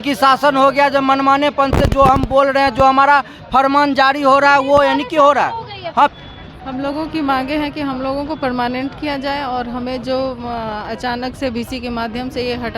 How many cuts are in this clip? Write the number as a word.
one